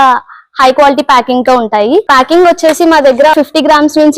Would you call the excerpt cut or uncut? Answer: cut